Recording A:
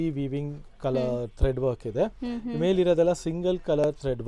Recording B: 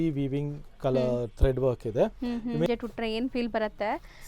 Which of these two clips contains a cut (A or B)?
B